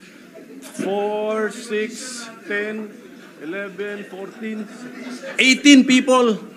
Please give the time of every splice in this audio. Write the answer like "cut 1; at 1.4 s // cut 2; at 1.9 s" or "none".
none